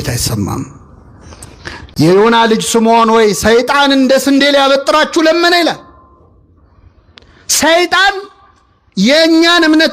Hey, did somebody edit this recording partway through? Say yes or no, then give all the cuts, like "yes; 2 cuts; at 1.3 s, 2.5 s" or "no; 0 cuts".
no; 0 cuts